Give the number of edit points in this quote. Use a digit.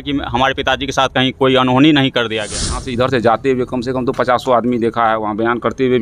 1